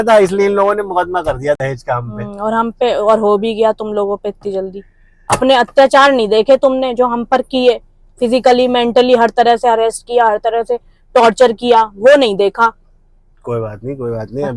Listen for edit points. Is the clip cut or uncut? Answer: uncut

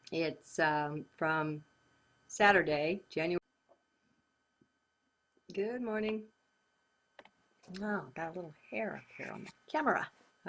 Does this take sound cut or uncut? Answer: uncut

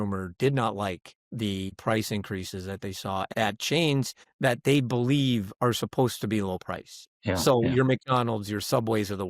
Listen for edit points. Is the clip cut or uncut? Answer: cut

